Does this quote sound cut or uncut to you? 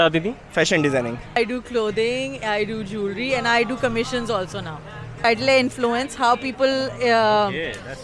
cut